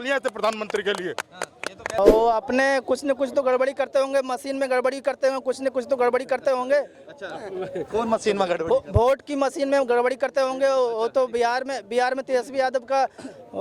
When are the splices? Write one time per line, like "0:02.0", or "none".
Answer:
0:02.0